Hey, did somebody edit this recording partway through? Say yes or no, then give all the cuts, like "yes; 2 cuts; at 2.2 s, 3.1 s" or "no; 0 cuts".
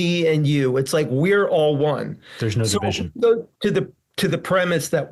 no; 0 cuts